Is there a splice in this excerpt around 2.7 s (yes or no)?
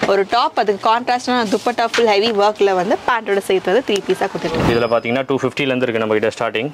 no